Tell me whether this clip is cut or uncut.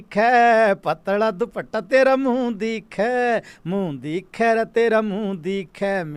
uncut